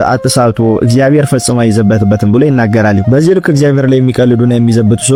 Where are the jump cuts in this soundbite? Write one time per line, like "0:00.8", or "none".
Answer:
none